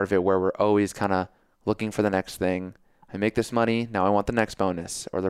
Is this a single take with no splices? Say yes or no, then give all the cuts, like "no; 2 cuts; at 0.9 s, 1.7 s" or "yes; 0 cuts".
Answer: yes; 0 cuts